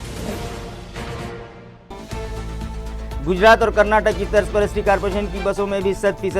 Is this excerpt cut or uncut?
cut